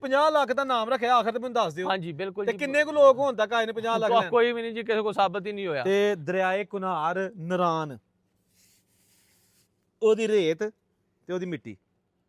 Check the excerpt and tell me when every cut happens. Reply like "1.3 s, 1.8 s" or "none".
5.8 s